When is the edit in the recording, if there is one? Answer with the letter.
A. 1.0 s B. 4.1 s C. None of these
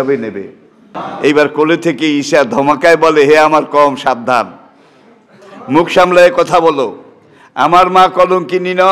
A